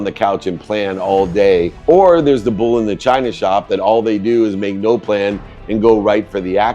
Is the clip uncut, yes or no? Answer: no